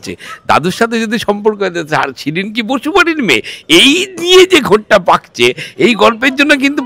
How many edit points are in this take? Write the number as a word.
zero